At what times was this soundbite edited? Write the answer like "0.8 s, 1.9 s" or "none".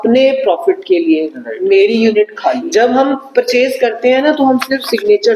2.6 s